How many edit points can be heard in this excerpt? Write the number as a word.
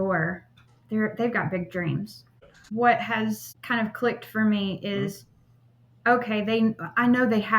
two